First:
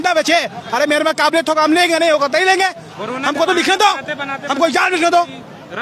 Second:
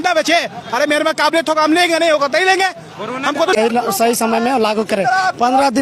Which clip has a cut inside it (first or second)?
second